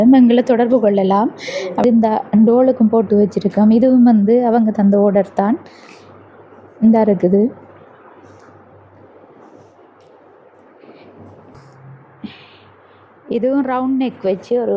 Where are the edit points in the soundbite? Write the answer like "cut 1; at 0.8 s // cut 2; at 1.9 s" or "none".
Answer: cut 1; at 1.8 s // cut 2; at 11.5 s